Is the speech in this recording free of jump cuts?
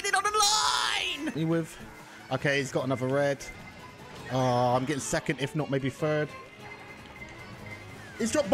no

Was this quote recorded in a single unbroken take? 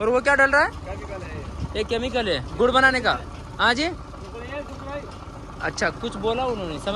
yes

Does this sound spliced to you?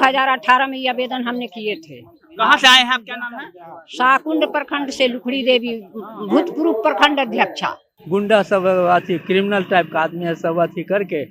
yes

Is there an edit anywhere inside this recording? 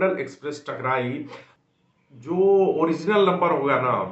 yes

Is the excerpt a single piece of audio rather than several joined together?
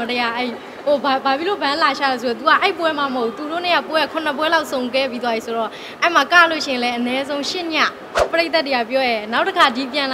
no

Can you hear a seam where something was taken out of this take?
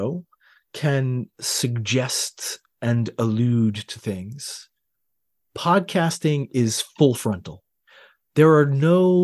no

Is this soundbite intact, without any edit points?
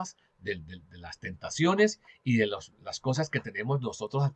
yes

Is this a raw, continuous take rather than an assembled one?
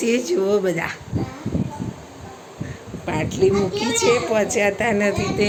yes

